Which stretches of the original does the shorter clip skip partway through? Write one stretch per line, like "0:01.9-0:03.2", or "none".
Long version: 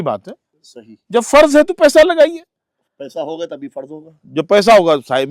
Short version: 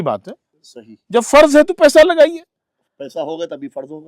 none